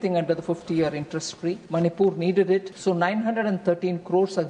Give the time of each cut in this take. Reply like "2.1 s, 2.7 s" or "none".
1.6 s, 2.7 s